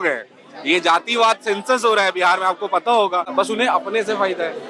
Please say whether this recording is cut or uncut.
cut